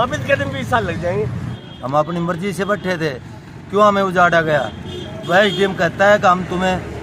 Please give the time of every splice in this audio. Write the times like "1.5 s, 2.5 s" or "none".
1.5 s

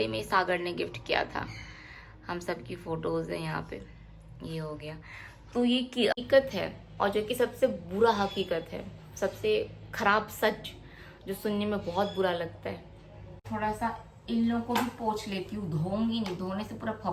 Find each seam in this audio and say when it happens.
6.1 s, 13.3 s

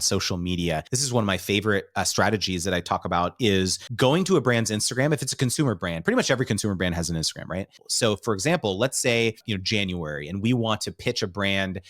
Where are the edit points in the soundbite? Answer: 0.9 s, 3.8 s, 7.8 s, 9.4 s

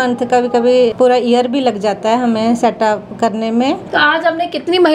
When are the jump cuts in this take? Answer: 0.9 s, 3.8 s

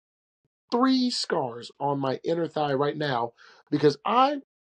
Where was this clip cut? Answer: none

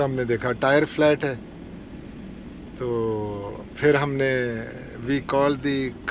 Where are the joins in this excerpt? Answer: none

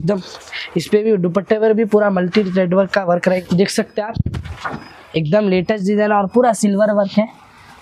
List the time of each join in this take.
3.4 s

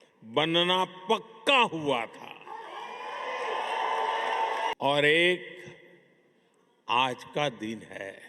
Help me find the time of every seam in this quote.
4.7 s

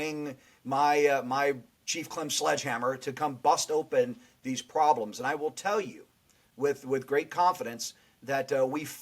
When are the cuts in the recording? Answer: 1.8 s

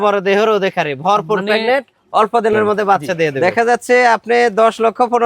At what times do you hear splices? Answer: 3.4 s

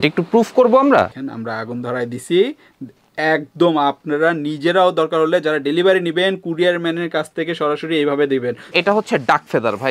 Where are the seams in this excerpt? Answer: 1.2 s, 8.6 s

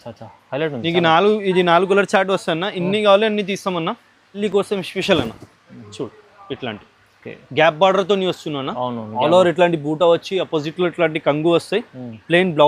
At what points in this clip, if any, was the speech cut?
4.4 s

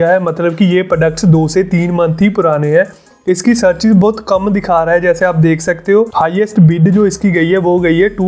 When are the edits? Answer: 3.1 s, 6.1 s

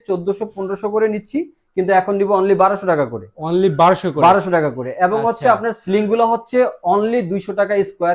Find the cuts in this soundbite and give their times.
none

